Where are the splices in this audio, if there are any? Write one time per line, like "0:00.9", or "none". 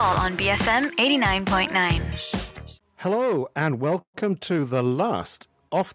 0:02.7